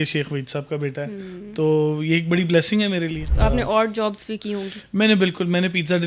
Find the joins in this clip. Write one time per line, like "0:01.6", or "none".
0:03.2

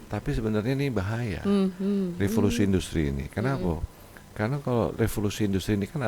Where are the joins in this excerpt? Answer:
none

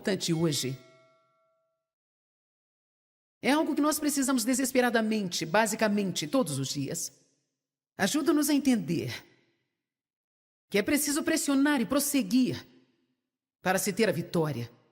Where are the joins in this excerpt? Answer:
none

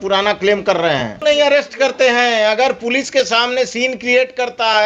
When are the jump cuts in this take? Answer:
0:01.2

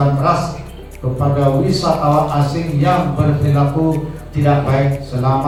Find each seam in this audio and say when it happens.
none

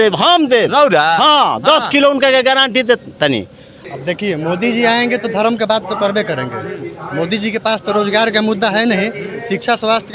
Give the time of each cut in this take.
0:03.7

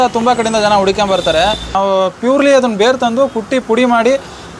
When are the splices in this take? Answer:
0:01.7

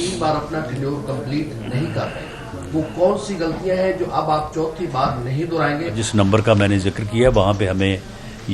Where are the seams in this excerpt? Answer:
0:06.0

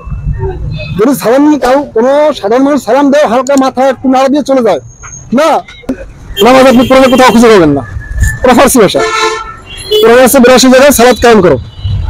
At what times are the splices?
0:06.0

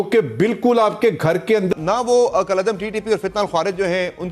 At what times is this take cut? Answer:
0:01.7

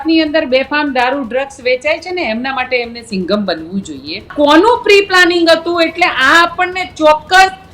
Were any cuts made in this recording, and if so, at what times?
0:04.3

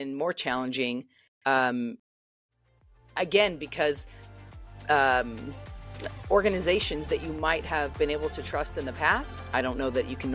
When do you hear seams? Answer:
0:09.4

